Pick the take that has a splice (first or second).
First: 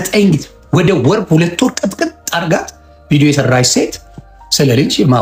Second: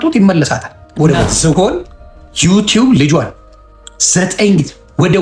second